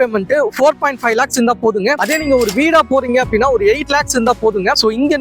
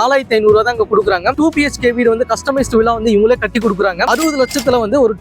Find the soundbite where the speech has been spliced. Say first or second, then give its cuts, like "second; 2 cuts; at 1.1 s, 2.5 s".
second; 1 cut; at 1.3 s